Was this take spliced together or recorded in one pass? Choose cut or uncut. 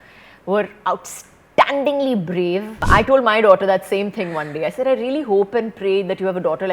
cut